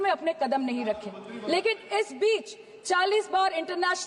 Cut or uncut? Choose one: uncut